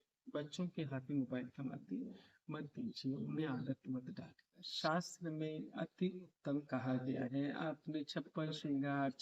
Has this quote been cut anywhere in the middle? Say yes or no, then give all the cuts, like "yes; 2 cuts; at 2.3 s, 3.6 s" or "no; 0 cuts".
yes; 1 cut; at 4.6 s